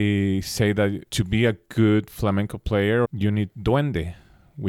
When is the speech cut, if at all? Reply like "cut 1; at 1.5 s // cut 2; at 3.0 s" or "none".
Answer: cut 1; at 1.1 s // cut 2; at 3.1 s